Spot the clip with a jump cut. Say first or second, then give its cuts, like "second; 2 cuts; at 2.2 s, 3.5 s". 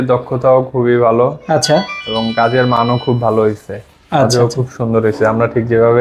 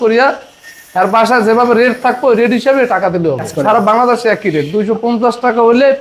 second; 1 cut; at 3.5 s